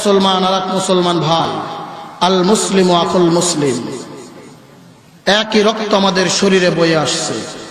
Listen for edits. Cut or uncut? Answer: cut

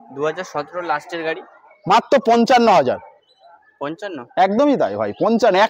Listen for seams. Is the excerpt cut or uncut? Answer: uncut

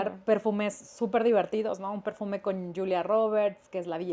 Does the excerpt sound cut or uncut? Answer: uncut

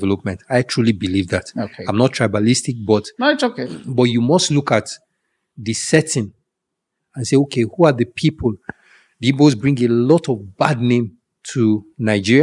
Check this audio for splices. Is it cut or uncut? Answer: uncut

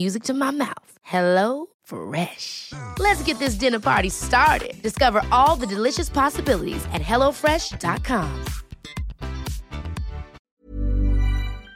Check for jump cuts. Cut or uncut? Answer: cut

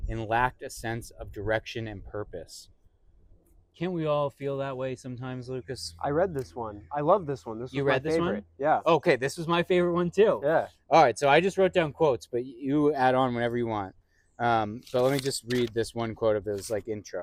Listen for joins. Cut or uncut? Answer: uncut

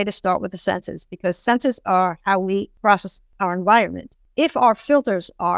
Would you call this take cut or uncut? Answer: cut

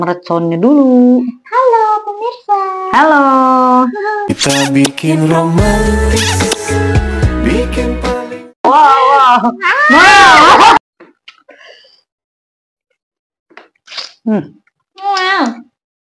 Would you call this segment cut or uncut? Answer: cut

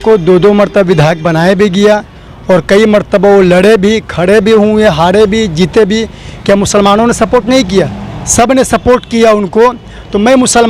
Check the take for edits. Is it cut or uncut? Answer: uncut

